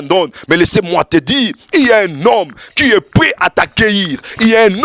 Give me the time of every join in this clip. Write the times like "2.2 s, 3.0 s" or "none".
none

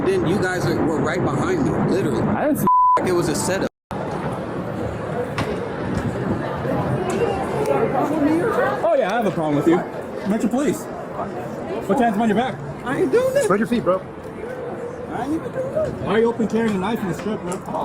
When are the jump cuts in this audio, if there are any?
4.1 s

